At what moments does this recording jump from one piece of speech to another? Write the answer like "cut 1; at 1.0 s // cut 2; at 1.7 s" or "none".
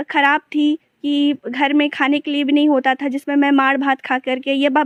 none